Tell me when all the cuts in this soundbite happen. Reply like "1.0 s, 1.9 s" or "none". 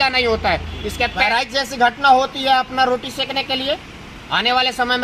1.2 s